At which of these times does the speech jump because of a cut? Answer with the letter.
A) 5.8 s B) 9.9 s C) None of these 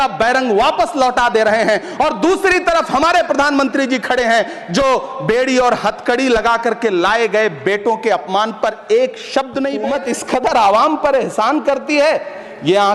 B